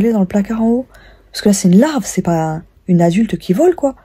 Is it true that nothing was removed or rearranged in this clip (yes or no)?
yes